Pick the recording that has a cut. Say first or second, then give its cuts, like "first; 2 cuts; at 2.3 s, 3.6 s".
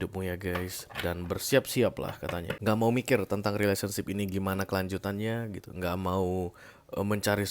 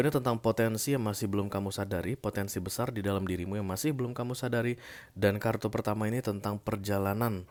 first; 1 cut; at 2.5 s